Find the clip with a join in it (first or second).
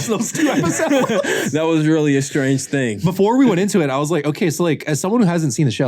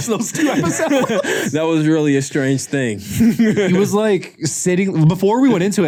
first